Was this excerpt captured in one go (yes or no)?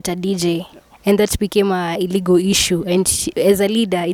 yes